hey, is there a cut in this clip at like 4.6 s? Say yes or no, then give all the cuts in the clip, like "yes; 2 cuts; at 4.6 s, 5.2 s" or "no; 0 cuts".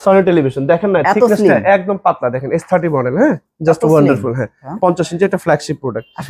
yes; 1 cut; at 4.6 s